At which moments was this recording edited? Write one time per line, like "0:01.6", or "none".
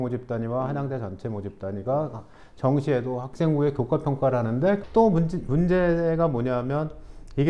0:04.8

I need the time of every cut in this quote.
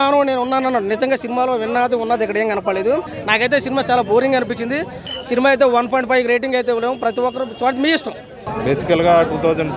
0:03.1
0:05.0
0:08.5

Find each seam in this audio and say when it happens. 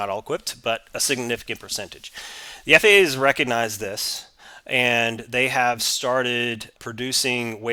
none

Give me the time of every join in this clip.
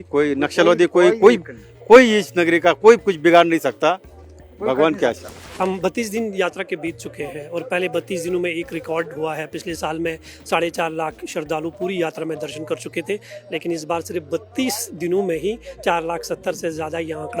none

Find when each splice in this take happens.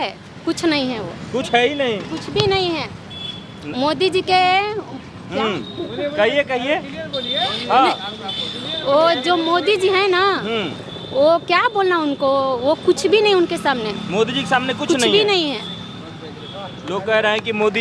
none

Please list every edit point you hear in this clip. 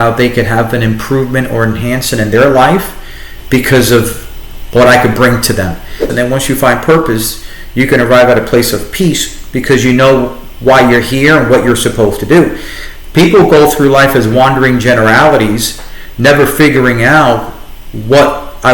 0:06.0

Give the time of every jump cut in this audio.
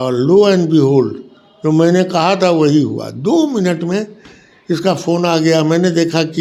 none

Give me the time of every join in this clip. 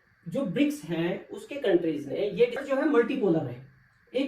0:02.6

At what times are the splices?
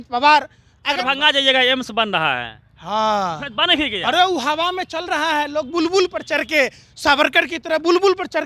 0:01.0

